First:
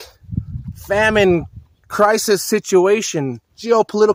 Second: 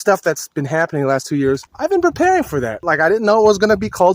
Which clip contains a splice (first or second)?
second